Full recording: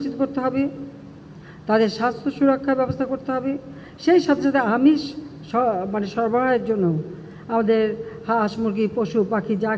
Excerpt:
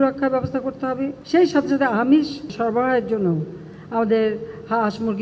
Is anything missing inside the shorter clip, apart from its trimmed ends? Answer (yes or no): yes